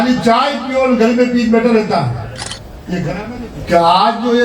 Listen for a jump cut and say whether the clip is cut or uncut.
cut